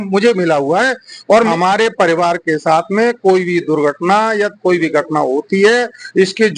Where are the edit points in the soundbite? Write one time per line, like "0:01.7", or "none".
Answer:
0:01.5